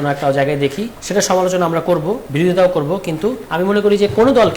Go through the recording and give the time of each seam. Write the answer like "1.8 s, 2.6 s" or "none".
0.9 s, 2.2 s, 3.4 s